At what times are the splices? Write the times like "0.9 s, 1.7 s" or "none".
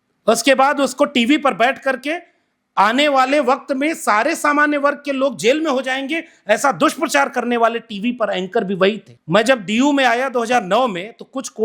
9.1 s